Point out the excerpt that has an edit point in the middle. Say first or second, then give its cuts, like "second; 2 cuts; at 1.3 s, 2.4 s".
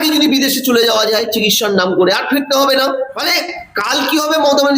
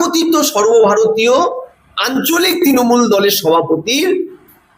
first; 1 cut; at 3.2 s